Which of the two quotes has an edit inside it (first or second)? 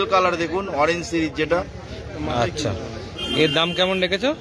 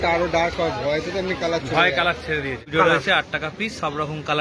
second